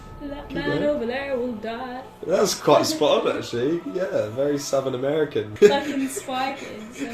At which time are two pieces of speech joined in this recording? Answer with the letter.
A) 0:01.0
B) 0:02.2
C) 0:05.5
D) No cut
C